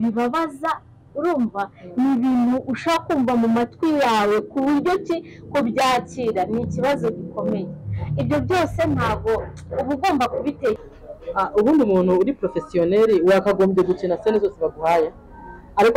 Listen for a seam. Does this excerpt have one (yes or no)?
yes